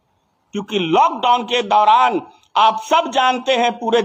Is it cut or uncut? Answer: uncut